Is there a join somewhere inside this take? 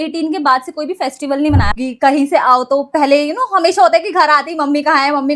yes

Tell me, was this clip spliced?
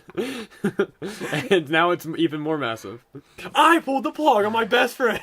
yes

